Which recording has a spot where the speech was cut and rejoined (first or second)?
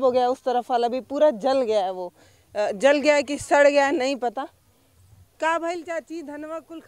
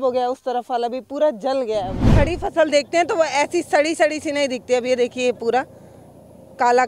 second